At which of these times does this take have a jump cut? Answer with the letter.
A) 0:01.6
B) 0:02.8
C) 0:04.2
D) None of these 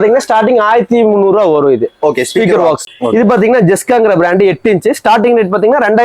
B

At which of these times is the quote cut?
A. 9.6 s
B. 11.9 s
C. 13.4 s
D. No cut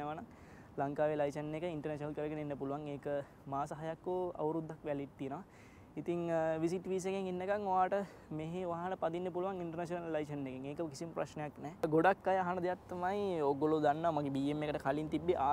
B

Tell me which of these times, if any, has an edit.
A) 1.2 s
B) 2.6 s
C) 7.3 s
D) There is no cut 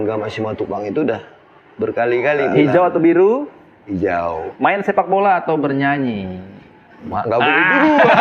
B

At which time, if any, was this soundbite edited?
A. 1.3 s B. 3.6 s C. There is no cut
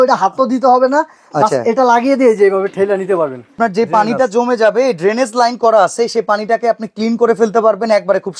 B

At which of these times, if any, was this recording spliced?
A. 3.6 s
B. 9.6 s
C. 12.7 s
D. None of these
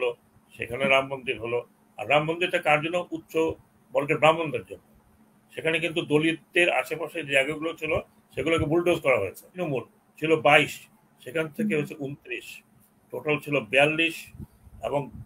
B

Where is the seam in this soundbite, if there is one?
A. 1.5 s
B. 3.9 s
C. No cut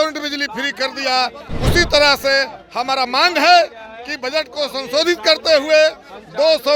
C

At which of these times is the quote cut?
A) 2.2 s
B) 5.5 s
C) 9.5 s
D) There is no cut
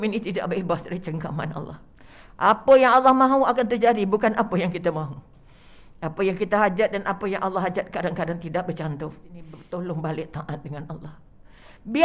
C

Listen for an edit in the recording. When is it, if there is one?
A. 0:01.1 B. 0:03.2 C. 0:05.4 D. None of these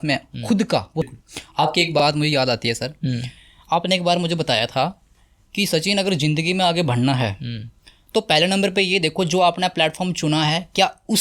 A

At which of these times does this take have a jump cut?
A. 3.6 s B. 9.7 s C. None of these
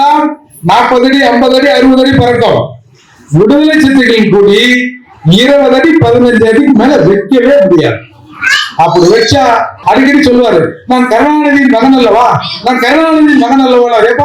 B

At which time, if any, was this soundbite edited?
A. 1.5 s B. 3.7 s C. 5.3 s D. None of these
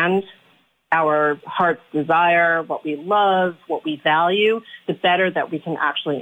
A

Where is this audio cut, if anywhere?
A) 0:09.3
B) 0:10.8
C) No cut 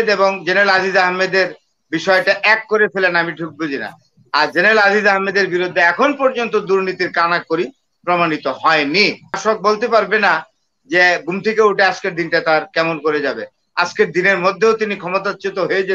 A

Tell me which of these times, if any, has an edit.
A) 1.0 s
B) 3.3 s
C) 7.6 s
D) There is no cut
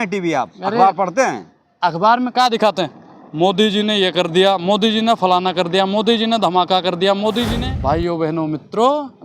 C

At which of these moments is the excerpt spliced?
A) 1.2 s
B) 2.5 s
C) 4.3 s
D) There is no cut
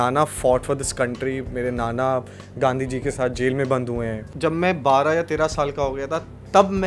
C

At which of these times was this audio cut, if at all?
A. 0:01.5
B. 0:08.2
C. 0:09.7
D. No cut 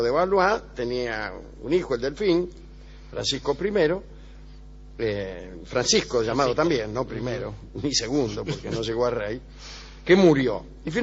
B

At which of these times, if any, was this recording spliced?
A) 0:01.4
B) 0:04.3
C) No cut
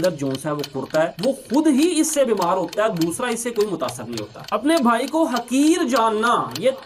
B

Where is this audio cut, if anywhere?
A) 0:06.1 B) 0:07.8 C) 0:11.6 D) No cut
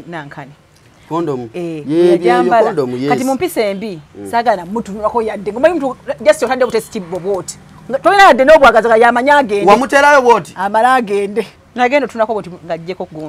C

